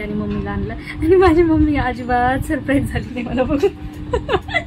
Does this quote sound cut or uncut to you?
uncut